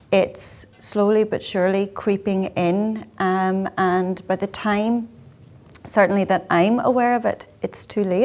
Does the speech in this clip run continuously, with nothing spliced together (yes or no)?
yes